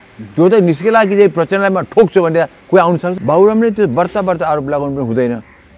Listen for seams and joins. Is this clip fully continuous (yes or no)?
no